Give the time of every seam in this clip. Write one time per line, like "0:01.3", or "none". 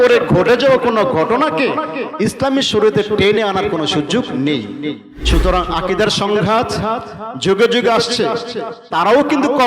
0:05.1